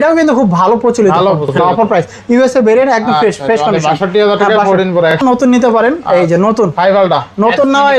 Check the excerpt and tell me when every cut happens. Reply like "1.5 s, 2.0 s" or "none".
1.6 s, 5.2 s